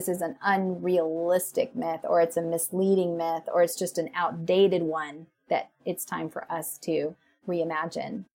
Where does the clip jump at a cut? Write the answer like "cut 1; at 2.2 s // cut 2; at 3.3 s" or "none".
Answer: cut 1; at 7.3 s

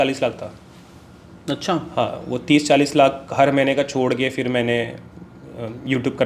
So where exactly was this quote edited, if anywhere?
none

